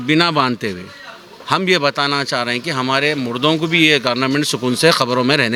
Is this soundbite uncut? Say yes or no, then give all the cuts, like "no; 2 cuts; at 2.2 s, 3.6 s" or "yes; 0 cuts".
yes; 0 cuts